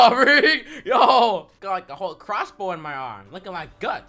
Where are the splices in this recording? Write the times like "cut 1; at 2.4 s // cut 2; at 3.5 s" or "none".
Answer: cut 1; at 1.5 s